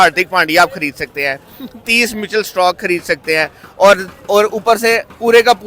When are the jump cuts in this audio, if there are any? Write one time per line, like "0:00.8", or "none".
none